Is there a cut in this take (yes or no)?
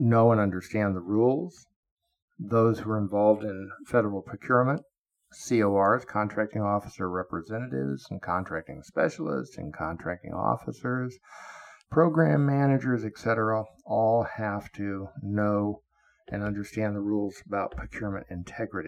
no